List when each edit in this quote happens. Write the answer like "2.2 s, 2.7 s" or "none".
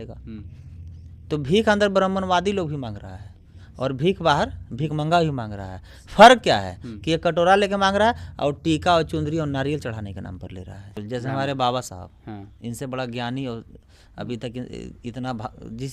11.0 s

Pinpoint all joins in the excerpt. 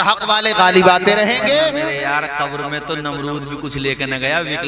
1.8 s

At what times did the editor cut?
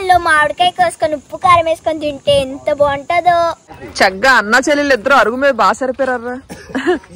3.7 s

